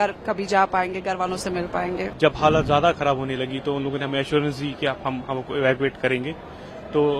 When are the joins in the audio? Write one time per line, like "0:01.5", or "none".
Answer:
0:02.1